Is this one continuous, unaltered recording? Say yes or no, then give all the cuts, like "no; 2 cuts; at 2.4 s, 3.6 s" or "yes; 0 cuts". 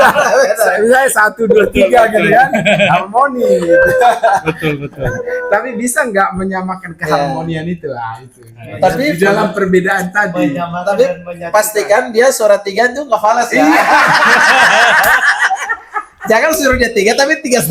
yes; 0 cuts